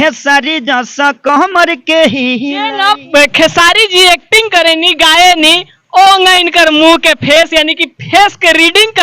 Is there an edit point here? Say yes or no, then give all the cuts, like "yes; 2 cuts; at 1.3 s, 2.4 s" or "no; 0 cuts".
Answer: yes; 1 cut; at 2.8 s